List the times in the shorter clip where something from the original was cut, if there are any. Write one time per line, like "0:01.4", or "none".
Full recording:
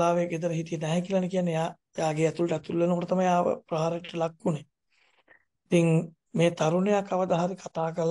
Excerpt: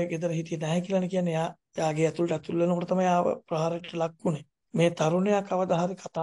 0:04.6

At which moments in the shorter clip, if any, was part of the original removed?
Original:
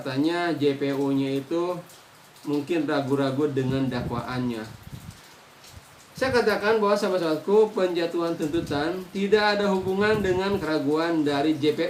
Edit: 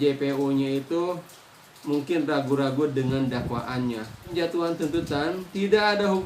0:04.3

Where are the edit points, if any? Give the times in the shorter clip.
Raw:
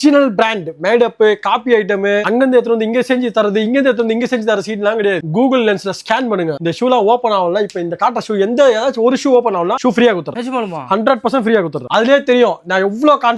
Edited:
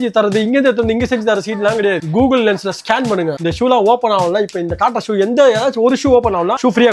none

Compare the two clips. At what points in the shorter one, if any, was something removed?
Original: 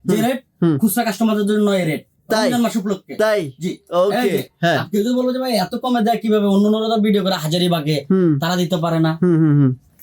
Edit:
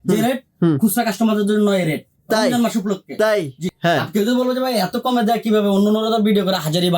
0:03.7

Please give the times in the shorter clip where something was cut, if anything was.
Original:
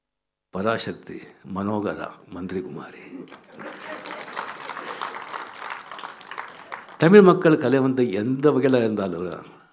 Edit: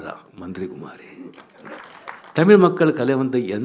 0:01.8

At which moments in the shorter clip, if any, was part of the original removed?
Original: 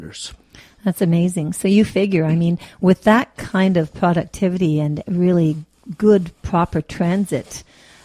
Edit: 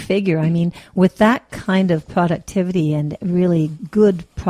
0:03.3

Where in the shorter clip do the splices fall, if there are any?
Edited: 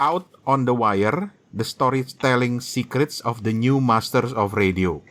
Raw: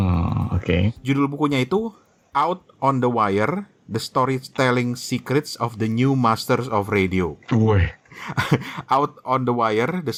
none

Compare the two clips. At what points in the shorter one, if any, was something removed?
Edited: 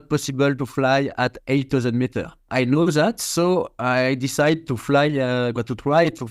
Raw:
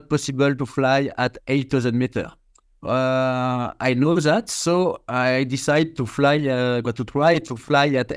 0:02.4

